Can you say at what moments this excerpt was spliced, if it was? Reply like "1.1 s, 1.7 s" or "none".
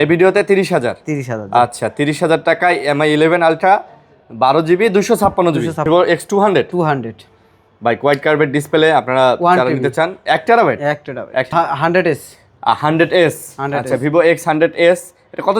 5.8 s, 11.5 s